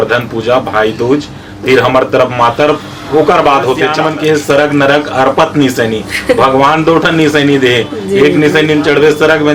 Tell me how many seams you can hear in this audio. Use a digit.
1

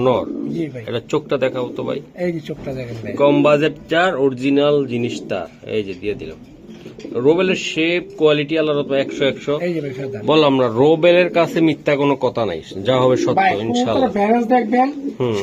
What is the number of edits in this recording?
0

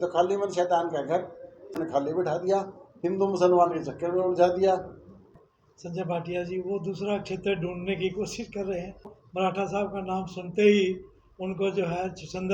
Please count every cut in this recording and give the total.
3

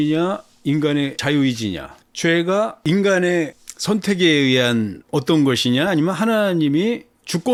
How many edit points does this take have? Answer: 0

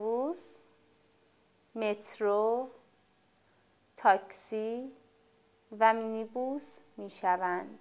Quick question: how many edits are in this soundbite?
0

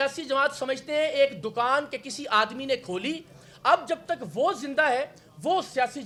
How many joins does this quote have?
0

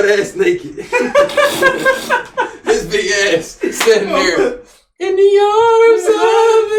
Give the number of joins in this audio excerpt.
0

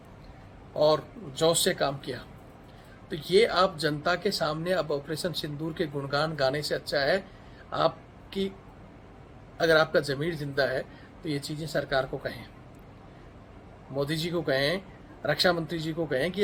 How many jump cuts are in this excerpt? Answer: 0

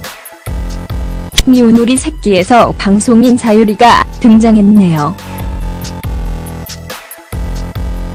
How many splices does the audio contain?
0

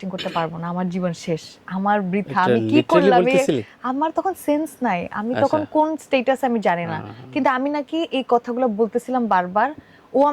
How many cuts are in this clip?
0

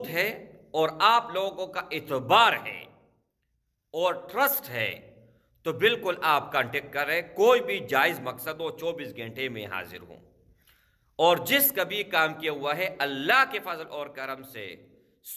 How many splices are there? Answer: 0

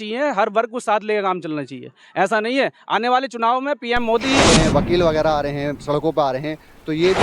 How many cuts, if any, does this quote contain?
1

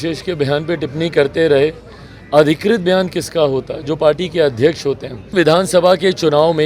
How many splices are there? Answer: 1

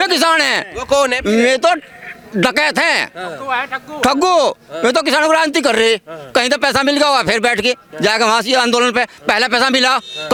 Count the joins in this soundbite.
0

